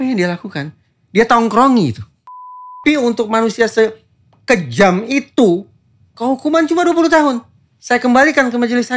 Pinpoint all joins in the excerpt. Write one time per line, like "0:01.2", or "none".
0:02.8